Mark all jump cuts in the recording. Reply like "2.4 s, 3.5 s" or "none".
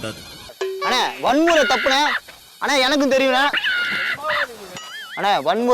4.6 s